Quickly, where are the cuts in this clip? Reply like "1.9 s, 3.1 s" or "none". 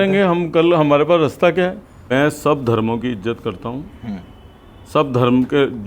2.1 s